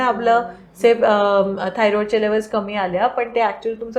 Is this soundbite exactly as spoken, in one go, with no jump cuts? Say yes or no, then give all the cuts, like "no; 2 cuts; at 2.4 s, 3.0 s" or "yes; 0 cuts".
yes; 0 cuts